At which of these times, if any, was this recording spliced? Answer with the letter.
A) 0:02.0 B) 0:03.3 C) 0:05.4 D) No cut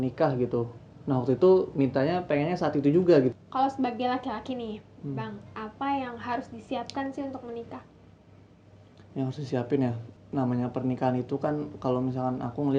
B